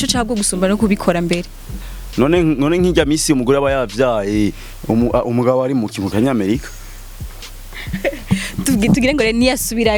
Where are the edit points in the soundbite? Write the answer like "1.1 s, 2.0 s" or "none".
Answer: none